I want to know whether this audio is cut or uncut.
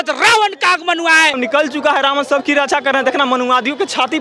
cut